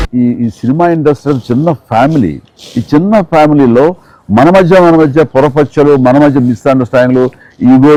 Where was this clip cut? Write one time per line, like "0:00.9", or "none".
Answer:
none